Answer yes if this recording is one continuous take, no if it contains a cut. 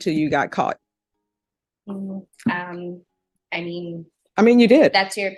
yes